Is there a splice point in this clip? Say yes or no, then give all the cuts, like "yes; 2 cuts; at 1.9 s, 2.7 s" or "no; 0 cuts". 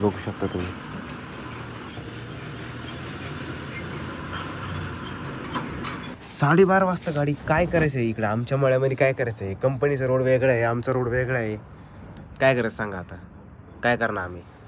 yes; 1 cut; at 6.1 s